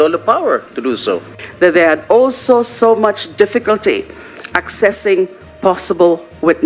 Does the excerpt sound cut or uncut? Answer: cut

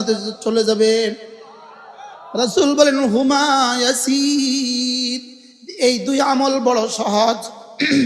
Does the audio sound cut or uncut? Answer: uncut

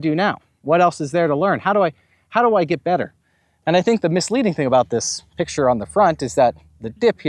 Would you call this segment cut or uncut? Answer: uncut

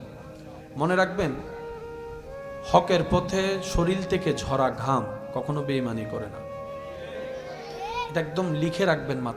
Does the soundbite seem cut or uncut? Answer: uncut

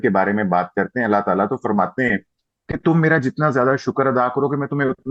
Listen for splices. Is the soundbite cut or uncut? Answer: uncut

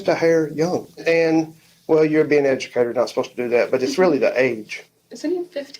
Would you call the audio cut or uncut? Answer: cut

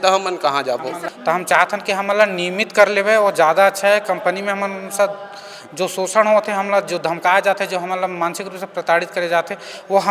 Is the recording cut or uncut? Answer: cut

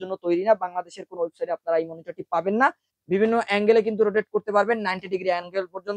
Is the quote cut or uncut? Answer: cut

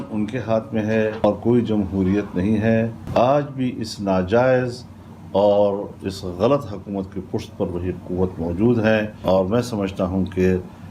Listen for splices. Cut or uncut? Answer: cut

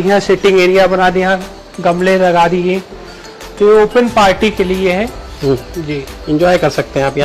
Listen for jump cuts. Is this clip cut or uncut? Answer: uncut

